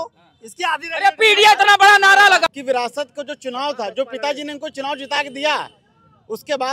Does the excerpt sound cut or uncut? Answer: cut